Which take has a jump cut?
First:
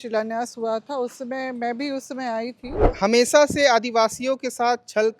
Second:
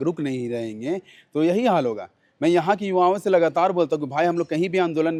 first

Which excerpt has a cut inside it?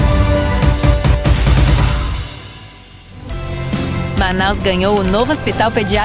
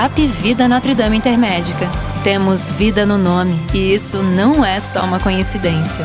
first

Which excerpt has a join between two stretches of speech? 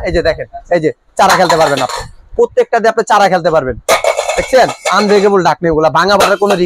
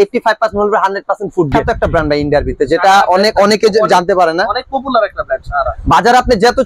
second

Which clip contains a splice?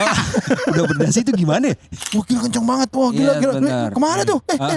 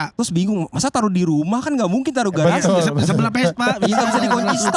first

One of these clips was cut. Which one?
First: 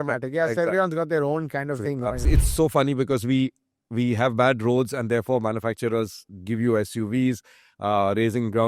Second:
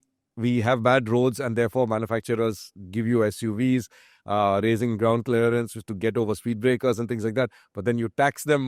first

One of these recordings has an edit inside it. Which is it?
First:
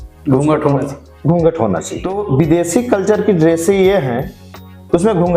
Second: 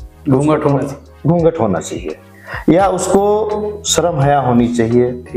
first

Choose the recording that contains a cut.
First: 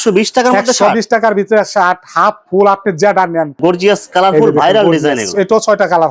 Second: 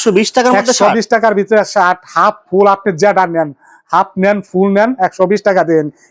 first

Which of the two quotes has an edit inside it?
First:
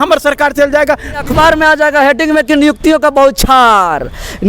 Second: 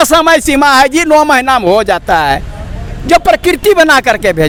first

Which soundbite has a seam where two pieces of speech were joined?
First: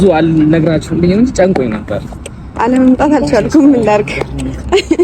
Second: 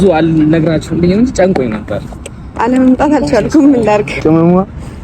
second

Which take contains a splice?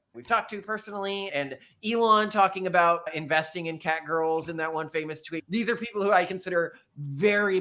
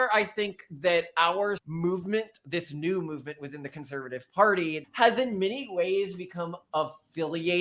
second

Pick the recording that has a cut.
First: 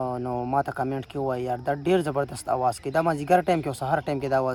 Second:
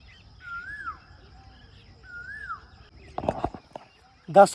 second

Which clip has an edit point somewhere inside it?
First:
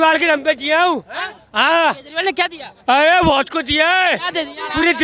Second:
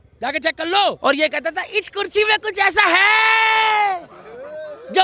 second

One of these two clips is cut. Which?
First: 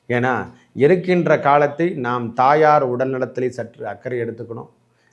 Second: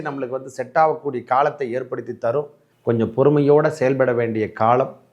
second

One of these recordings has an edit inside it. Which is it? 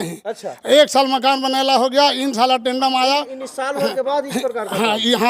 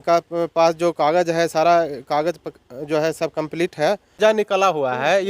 second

